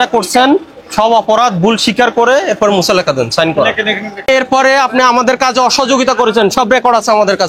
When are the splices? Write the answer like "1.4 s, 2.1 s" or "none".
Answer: 4.1 s